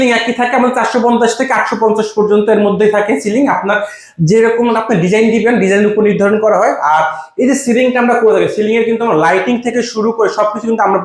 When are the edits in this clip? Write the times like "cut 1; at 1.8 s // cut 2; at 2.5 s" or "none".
none